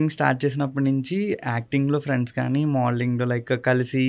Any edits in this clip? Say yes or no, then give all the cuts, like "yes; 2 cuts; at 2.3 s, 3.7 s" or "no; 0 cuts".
no; 0 cuts